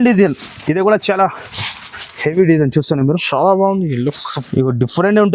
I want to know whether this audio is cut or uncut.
cut